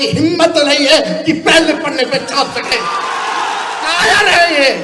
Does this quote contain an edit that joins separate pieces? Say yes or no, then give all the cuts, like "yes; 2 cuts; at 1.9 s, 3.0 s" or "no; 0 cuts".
yes; 1 cut; at 3.9 s